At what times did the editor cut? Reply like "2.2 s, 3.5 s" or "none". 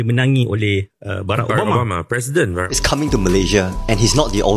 2.7 s